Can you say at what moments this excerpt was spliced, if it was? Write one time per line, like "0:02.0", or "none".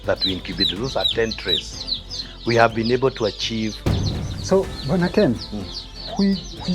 0:04.2